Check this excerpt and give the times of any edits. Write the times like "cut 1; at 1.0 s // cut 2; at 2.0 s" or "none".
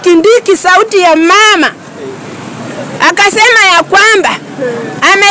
none